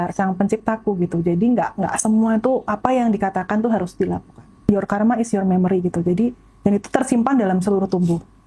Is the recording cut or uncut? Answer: cut